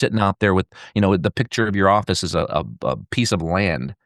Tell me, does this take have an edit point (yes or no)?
no